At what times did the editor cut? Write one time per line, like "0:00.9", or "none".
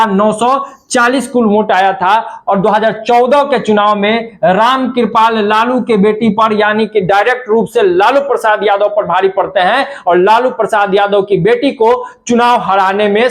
none